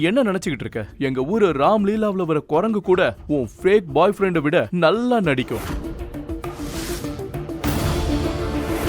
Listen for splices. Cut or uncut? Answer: uncut